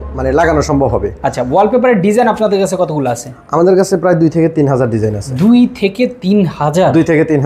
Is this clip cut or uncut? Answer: uncut